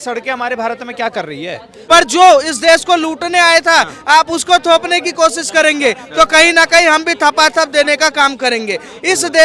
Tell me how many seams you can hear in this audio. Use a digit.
1